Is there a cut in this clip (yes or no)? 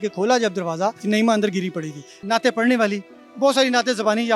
yes